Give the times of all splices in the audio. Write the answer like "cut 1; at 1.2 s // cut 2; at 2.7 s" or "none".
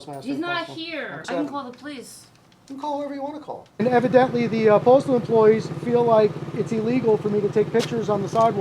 cut 1; at 1.2 s // cut 2; at 3.8 s